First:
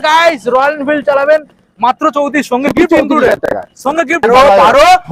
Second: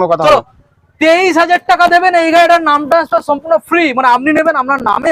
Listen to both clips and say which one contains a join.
first; 1 cut; at 4.2 s

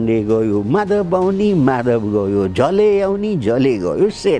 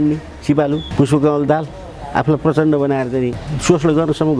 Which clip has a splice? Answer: second; 2 cuts; at 0.9 s, 3.5 s

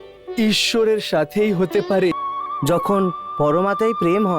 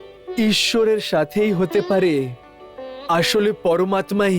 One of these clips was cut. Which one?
first; 1 cut; at 2.1 s

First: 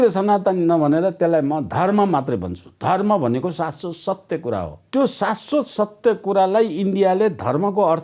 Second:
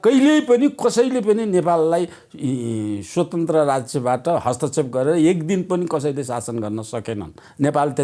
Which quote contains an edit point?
first; 1 cut; at 4.8 s

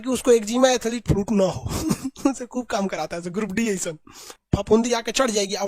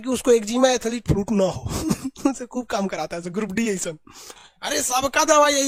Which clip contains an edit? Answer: first; 1 cut; at 4.4 s

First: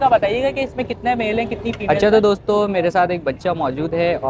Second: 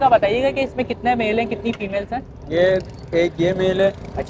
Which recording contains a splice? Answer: first; 1 cut; at 1.9 s

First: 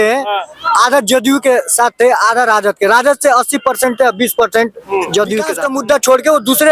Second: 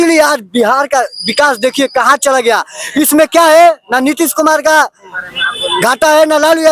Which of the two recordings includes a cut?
first; 1 cut; at 5.6 s

